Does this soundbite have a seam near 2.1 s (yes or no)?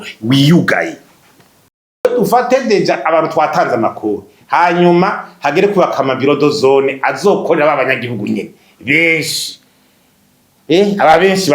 yes